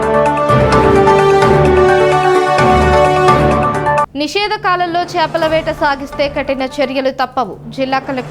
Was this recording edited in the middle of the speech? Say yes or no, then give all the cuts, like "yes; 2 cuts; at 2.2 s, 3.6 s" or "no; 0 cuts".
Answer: yes; 1 cut; at 1.4 s